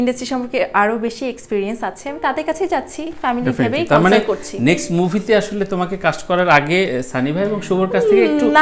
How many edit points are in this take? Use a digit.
0